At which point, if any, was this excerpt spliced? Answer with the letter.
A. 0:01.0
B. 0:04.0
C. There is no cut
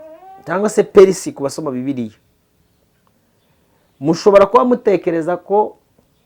C